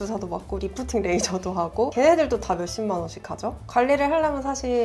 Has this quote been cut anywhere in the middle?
yes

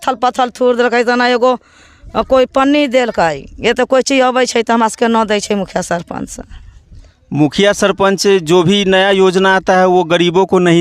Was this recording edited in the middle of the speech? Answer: no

